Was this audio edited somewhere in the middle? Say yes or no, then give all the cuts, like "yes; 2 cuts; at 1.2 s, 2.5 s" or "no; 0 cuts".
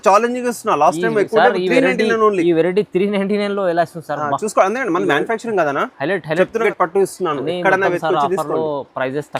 yes; 1 cut; at 6.6 s